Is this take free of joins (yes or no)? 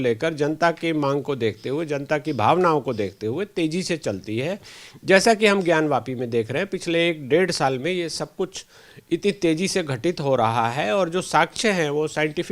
yes